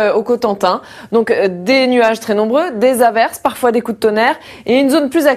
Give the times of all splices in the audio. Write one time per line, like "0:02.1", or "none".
none